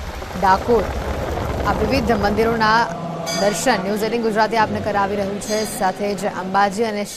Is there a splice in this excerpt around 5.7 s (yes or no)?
no